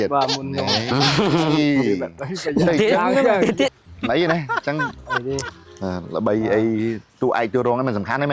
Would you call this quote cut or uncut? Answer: cut